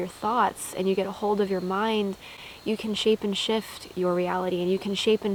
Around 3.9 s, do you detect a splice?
no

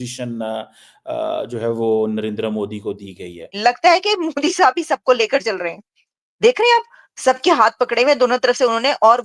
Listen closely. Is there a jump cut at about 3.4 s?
yes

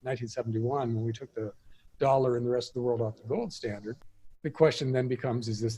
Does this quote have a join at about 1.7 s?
no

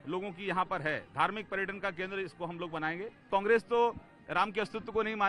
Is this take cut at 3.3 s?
yes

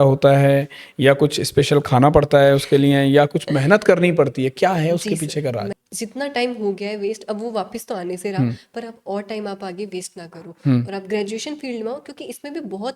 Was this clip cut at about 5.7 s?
yes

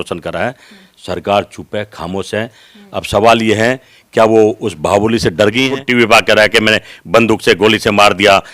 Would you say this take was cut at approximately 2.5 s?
no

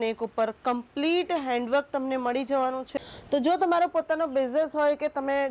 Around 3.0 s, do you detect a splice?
yes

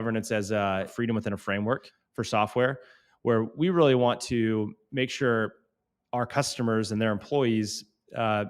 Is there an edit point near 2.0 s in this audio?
yes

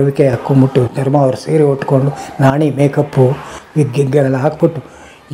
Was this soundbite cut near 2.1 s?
no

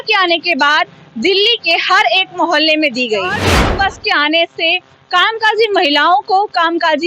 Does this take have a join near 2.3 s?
no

